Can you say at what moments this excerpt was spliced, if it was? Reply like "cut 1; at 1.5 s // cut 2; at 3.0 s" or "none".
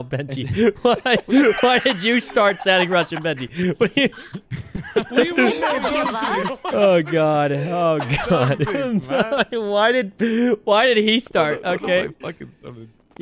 none